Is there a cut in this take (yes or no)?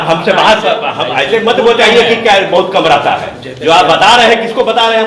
no